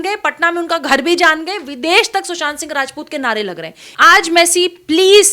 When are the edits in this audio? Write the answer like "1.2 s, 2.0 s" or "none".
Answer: 3.8 s